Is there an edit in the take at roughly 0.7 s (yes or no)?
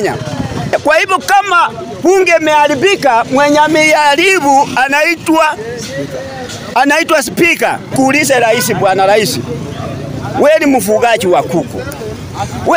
yes